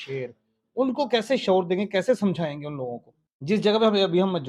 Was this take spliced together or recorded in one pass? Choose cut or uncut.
cut